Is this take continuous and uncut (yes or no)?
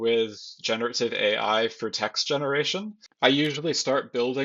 no